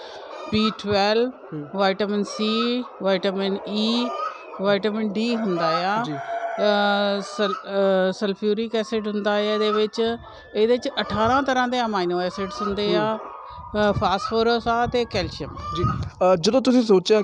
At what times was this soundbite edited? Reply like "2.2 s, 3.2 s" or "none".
none